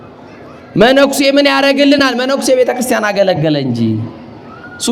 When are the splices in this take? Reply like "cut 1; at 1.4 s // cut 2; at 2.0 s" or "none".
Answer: none